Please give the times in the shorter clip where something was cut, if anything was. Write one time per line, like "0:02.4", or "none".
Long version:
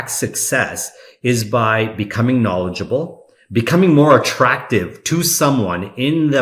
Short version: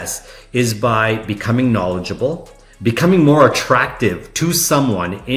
none